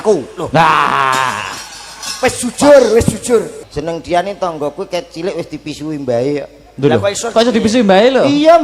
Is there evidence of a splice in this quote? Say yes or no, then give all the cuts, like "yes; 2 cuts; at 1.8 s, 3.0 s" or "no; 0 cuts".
yes; 1 cut; at 3.7 s